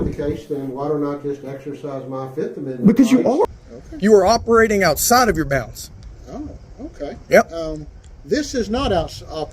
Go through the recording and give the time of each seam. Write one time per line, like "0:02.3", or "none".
0:03.5